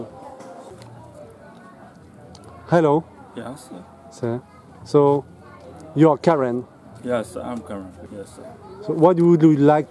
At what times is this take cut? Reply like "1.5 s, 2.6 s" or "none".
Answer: 0.7 s, 8.0 s

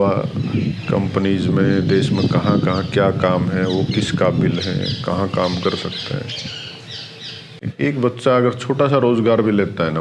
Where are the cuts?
7.5 s

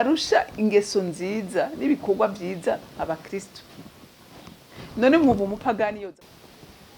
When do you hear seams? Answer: 6.0 s

